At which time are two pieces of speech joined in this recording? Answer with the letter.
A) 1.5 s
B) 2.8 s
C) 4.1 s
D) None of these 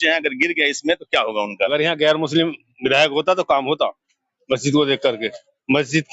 A